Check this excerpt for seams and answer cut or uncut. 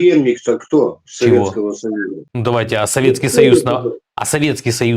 cut